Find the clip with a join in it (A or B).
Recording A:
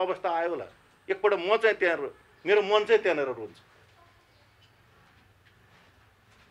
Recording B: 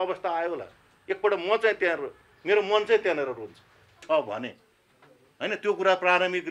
B